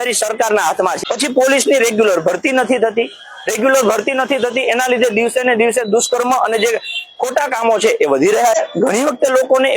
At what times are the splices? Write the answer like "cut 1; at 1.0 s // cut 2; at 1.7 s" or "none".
cut 1; at 1.0 s // cut 2; at 8.6 s